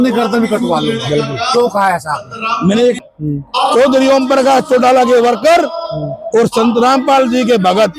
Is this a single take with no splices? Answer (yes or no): no